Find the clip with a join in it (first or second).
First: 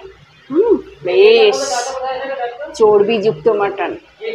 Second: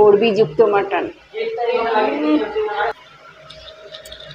second